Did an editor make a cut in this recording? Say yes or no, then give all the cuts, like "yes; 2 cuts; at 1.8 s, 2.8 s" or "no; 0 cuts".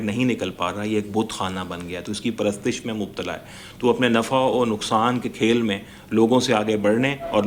no; 0 cuts